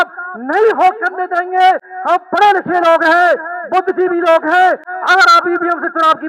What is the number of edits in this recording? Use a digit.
0